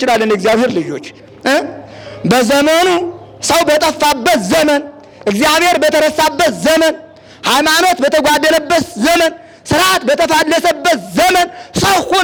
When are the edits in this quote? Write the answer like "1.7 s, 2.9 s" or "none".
none

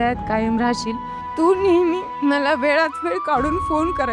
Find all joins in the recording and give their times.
1.2 s, 2.1 s

